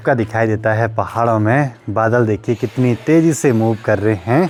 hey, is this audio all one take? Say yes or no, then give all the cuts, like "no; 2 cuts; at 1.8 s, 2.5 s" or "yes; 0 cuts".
yes; 0 cuts